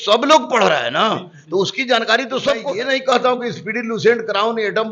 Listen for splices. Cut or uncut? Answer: cut